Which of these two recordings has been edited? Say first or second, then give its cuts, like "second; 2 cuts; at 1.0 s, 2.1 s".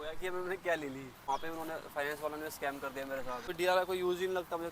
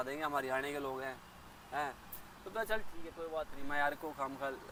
first; 2 cuts; at 1.2 s, 3.4 s